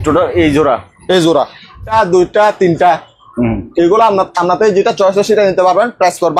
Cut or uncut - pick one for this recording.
cut